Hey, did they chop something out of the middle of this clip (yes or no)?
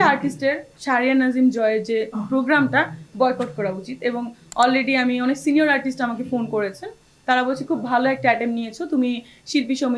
no